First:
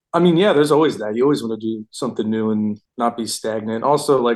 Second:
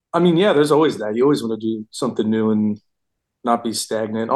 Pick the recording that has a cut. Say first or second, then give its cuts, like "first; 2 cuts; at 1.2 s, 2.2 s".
first; 1 cut; at 2.9 s